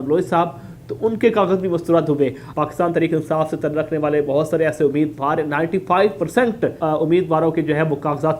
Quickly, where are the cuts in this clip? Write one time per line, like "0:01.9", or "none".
0:02.4
0:06.8